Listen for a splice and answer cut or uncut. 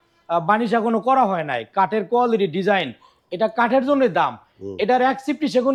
uncut